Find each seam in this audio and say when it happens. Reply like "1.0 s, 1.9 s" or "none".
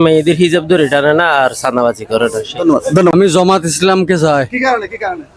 3.1 s